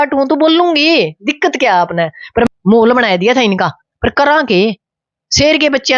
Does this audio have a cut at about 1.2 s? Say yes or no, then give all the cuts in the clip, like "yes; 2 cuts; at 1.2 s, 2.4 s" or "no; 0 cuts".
no; 1 cut; at 2.5 s